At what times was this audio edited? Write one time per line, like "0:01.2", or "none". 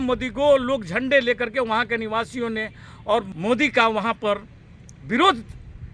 0:03.3